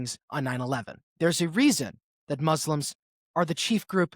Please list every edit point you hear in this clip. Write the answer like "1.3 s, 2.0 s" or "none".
1.0 s